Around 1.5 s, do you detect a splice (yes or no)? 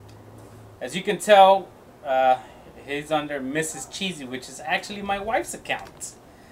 no